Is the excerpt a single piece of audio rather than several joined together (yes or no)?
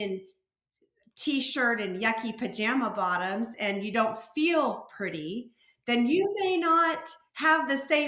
yes